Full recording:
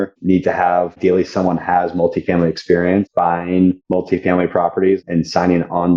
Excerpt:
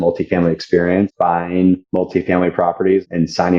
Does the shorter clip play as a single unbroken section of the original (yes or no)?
yes